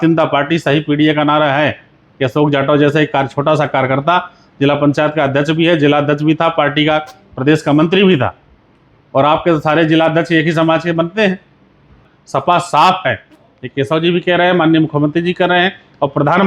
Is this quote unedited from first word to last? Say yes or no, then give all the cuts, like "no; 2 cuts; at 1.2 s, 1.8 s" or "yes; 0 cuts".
no; 1 cut; at 12.1 s